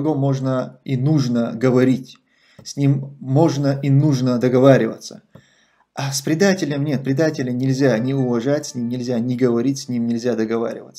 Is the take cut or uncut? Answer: uncut